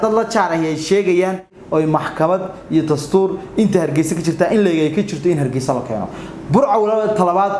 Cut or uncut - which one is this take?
cut